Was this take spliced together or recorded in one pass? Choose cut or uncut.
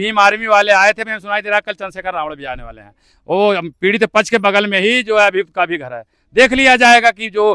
uncut